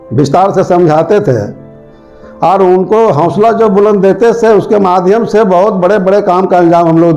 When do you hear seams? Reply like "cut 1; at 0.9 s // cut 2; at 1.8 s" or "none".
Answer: none